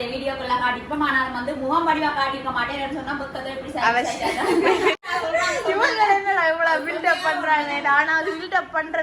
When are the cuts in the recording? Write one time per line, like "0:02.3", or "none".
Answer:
0:05.0